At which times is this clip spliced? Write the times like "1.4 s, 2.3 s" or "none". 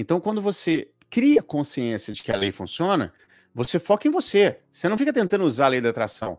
1.0 s